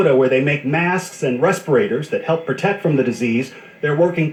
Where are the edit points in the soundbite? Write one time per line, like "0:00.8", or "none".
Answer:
none